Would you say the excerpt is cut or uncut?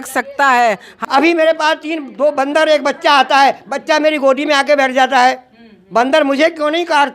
cut